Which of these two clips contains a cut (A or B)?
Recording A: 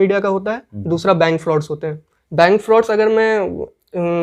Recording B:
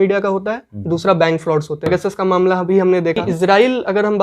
B